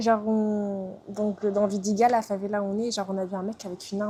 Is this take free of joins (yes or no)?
yes